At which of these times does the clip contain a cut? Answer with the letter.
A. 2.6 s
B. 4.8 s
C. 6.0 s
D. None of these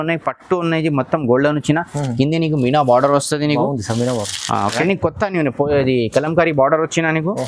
B